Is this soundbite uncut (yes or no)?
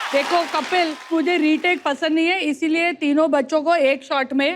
no